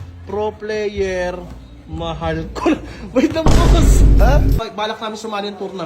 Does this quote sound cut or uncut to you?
cut